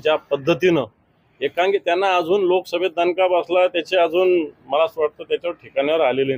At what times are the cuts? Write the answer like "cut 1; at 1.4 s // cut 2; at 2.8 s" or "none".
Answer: none